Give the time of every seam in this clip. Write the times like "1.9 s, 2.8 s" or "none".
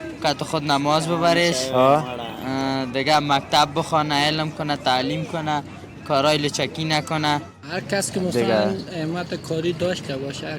7.5 s